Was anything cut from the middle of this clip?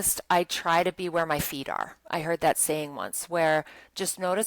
no; 0 cuts

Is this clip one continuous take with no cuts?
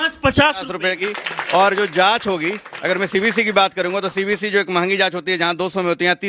no; 1 cut; at 1.0 s

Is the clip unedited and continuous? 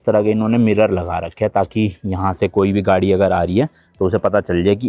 yes; 0 cuts

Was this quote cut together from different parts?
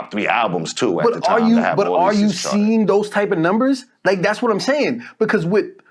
no; 0 cuts

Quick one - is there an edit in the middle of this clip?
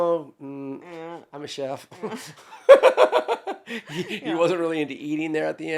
no; 0 cuts

